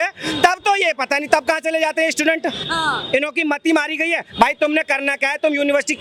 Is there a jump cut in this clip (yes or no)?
no